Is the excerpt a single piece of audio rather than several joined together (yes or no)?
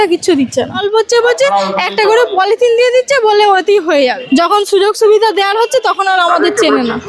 no